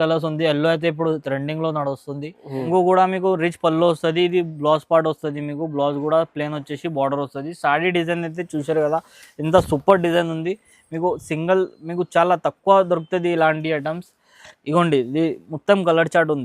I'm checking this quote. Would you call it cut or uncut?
cut